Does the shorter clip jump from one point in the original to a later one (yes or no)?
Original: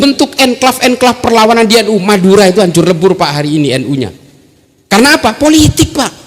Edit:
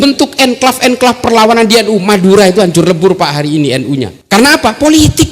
yes